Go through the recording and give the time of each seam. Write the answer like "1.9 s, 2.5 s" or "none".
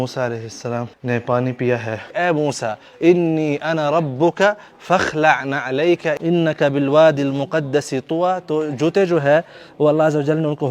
0.9 s, 2.1 s, 6.1 s